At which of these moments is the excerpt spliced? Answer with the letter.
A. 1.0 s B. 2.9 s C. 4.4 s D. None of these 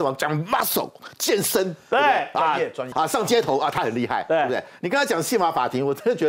B